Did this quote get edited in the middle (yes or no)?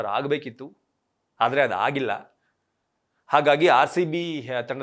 no